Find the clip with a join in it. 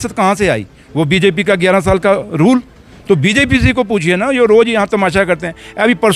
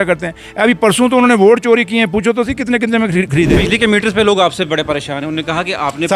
second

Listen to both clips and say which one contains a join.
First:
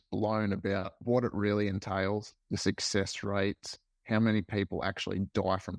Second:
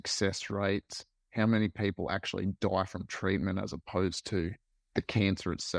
first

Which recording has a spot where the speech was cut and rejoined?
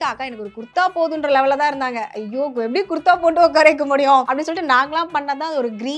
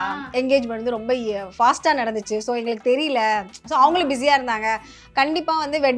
first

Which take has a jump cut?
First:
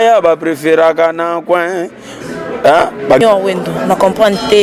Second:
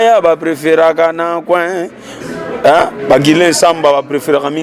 first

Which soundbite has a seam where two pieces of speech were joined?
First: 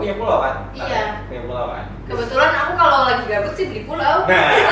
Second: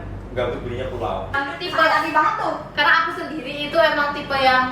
second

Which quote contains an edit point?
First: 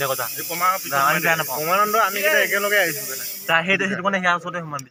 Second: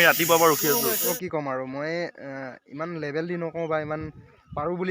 second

